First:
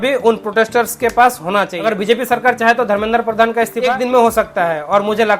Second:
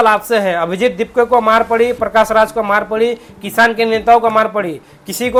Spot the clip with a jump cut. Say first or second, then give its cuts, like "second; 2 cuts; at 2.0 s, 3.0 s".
first; 2 cuts; at 1.8 s, 3.8 s